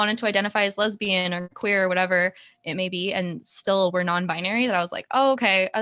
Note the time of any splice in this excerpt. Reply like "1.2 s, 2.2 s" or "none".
none